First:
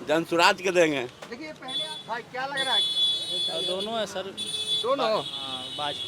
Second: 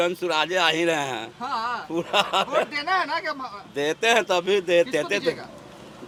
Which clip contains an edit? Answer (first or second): first